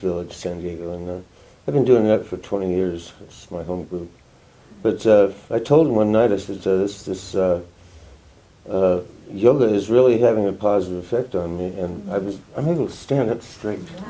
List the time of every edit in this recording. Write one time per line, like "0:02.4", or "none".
none